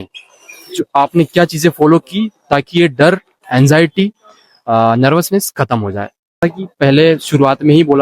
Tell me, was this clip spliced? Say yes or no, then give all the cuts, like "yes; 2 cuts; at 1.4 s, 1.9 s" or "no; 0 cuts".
yes; 1 cut; at 6.4 s